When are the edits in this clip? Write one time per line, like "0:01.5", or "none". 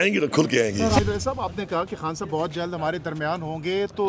0:00.9